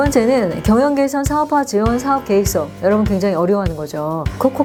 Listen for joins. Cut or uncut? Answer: uncut